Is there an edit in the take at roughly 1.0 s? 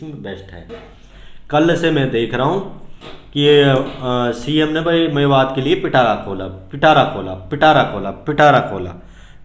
yes; 1 cut; at 1.0 s

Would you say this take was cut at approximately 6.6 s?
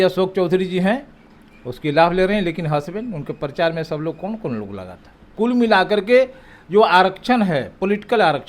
no; 1 cut; at 5.3 s

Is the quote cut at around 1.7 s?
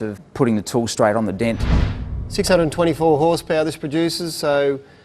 yes; 1 cut; at 1.7 s

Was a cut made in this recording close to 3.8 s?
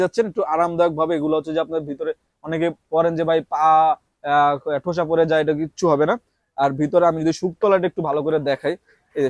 no; 0 cuts

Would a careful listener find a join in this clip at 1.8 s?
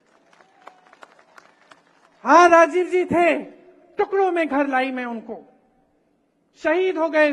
no; 0 cuts

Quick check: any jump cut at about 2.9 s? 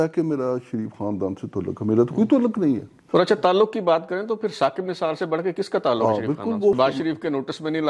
yes; 2 cuts; at 2.9 s, 6.8 s

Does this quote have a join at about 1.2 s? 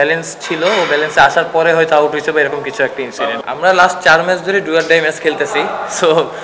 no; 1 cut; at 3.4 s

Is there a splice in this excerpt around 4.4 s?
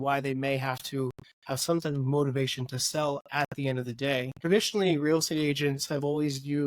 yes; 1 cut; at 4.4 s

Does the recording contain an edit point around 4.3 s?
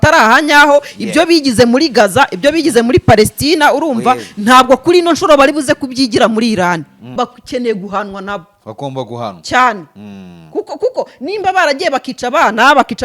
no; 1 cut; at 7.0 s

